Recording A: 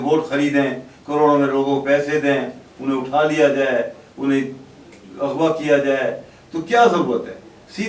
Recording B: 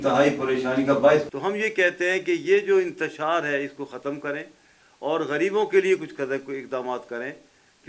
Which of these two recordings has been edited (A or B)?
B